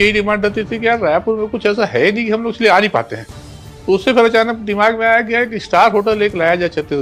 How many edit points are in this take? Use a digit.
0